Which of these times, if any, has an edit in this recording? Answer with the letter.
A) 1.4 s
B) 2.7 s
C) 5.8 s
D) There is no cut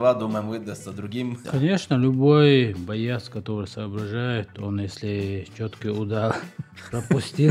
A